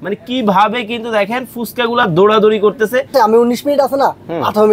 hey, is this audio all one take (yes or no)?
no